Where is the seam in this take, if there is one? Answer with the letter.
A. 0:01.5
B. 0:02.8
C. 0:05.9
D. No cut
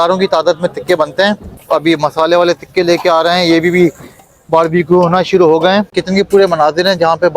C